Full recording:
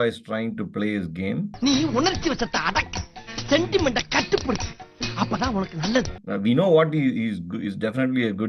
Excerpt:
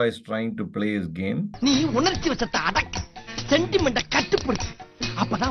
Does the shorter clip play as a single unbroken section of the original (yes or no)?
yes